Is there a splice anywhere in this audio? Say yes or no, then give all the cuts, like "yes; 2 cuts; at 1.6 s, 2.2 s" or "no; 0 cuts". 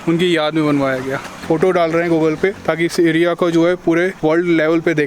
yes; 3 cuts; at 1.3 s, 2.6 s, 4.1 s